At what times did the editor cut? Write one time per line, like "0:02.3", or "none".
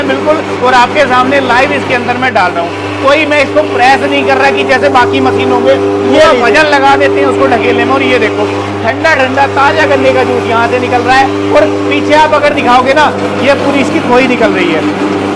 none